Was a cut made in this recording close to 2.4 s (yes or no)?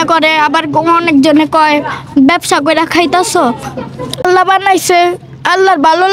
no